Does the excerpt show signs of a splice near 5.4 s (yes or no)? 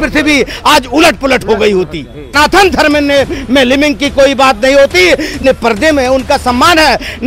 yes